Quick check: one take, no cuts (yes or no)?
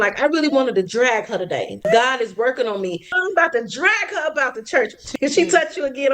no